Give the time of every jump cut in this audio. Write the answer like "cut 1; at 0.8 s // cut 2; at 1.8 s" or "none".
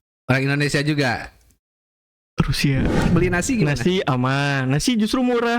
cut 1; at 3.1 s